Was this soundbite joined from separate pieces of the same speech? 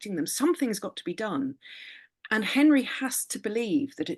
no; 0 cuts

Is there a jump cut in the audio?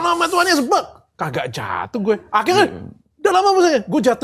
no; 0 cuts

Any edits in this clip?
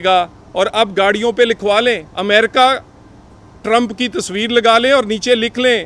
yes; 1 cut; at 2.1 s

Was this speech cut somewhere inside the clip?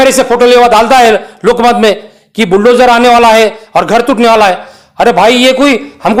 no; 0 cuts

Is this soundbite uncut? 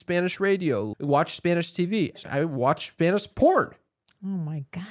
no; 2 cuts; at 0.9 s, 2.2 s

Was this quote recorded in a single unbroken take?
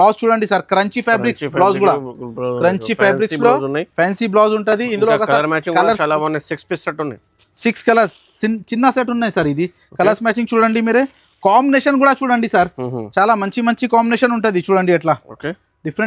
yes; 0 cuts

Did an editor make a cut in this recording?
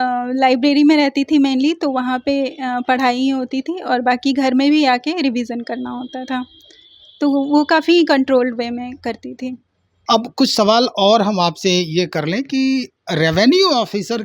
yes; 1 cut; at 9.7 s

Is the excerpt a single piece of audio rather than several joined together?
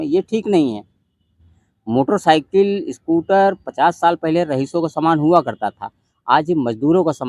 yes; 0 cuts

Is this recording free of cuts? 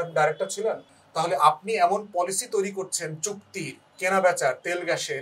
no; 1 cut; at 0.9 s

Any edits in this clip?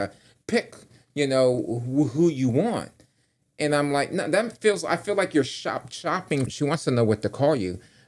yes; 1 cut; at 6.5 s

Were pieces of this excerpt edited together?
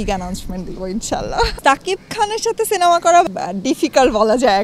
yes; 2 cuts; at 1.5 s, 3.2 s

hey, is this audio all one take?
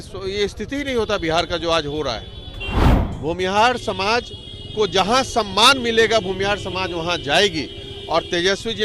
no; 1 cut; at 3.0 s

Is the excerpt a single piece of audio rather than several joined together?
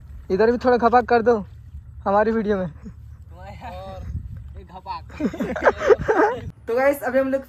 no; 1 cut; at 6.5 s

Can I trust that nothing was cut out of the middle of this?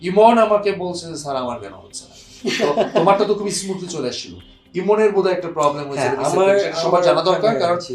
yes; 0 cuts

